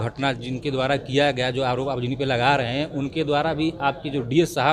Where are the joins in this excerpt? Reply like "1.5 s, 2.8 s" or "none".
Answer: none